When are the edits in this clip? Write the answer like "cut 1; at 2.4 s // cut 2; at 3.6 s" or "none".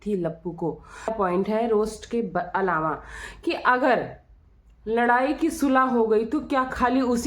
cut 1; at 1.1 s